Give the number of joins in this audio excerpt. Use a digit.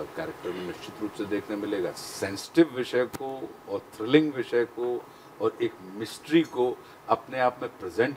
1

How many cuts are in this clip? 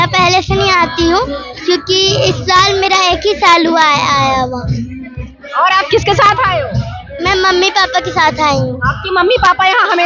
0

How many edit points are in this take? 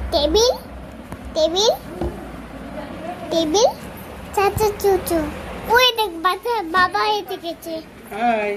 2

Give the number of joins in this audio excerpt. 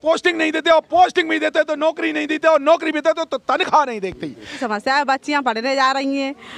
1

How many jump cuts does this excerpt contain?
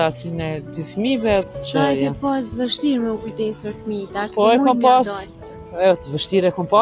1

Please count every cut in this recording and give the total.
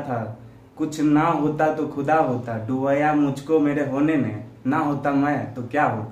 0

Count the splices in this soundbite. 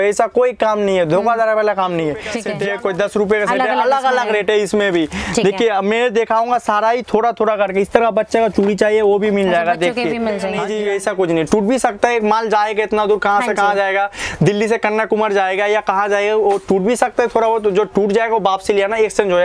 2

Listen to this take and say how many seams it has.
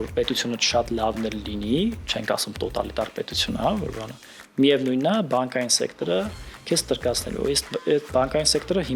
0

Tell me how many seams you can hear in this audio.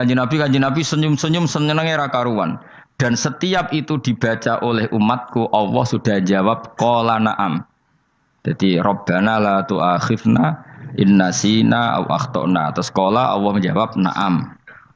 0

